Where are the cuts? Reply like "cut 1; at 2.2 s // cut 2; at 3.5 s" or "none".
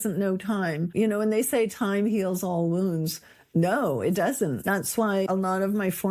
cut 1; at 0.9 s // cut 2; at 5.0 s